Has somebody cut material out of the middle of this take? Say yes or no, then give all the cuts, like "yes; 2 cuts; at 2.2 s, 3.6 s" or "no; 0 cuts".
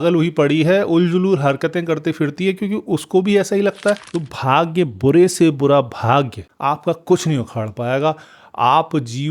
yes; 1 cut; at 4.1 s